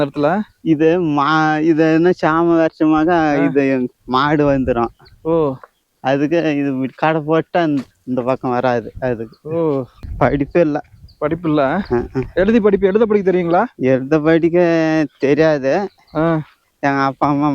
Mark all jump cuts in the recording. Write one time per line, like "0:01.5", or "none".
0:10.0
0:16.6